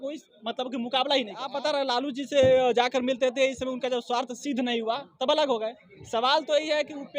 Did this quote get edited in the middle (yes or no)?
yes